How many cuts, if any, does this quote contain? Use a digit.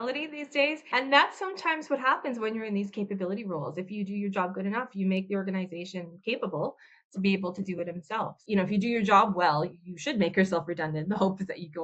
1